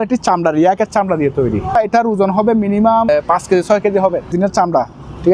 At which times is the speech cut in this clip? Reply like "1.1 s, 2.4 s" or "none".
1.8 s, 3.1 s, 4.3 s